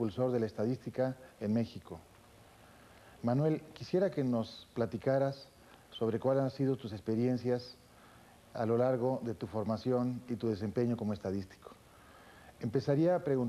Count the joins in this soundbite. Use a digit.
0